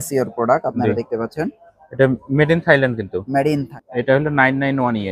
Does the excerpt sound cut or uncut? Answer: cut